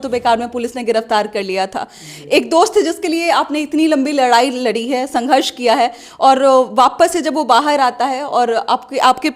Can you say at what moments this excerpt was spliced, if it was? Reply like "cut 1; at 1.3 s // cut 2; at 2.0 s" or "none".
none